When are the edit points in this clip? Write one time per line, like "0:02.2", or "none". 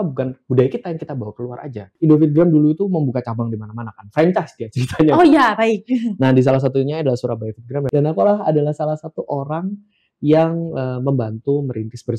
0:01.9